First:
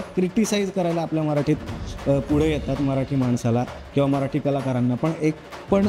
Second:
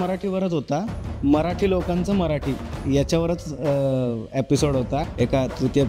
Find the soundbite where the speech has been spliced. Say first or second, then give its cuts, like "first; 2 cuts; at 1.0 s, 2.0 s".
second; 2 cuts; at 1.0 s, 5.1 s